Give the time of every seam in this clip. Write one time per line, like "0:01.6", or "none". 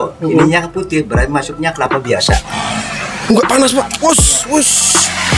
0:02.5